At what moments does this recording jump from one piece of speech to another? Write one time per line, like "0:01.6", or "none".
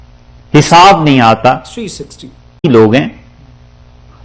0:02.6

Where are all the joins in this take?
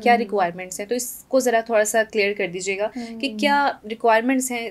none

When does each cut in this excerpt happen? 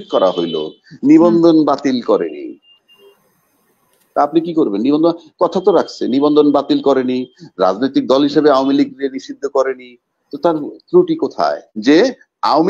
0:11.7

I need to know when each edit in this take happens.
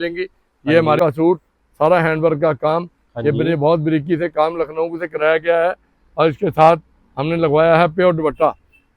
0:01.0

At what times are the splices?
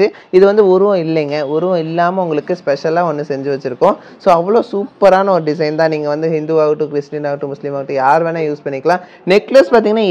0:09.1

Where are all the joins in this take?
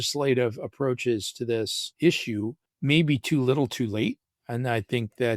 0:01.8
0:02.7

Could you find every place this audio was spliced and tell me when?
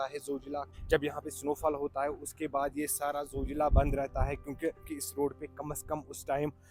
0:04.8

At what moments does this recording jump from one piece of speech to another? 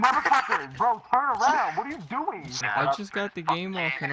0:02.6

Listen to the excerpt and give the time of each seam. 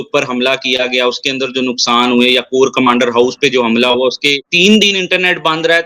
0:04.5

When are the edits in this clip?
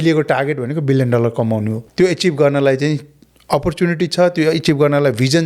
0:01.8

